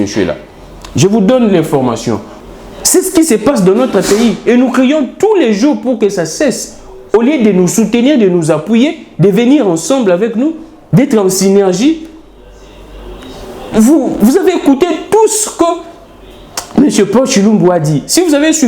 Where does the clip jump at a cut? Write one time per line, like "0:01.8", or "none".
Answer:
0:02.3